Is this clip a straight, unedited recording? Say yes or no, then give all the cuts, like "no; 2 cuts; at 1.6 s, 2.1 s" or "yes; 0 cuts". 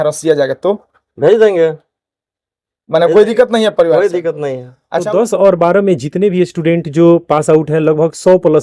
no; 1 cut; at 5.0 s